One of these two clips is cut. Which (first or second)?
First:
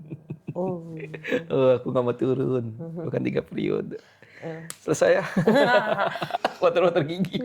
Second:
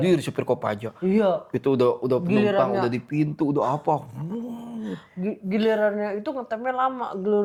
first